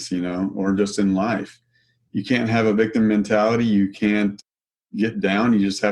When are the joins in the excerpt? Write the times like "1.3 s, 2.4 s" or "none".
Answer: 4.4 s